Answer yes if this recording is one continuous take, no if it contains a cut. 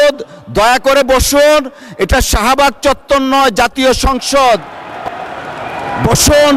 yes